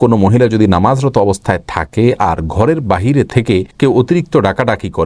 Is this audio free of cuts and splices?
yes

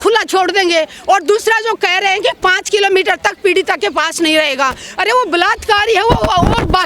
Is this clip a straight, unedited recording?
yes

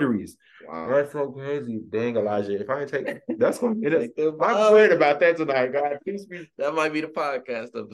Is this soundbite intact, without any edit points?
yes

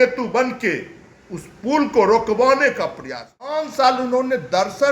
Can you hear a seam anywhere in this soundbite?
yes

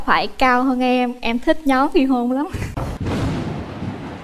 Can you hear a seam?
no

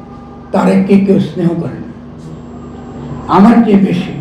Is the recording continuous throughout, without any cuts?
yes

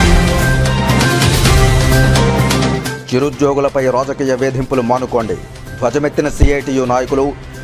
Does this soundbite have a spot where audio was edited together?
no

